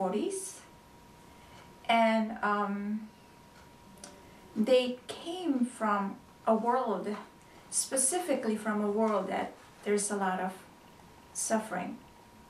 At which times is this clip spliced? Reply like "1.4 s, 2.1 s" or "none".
none